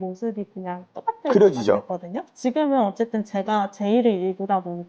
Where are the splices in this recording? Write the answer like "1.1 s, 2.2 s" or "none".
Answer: 2.2 s